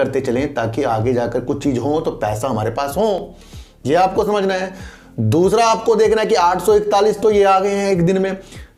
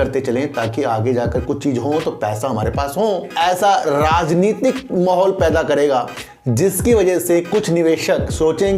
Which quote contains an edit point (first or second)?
second